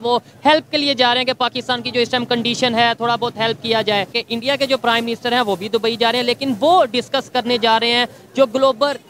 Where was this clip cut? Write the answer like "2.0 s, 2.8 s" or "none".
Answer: 4.2 s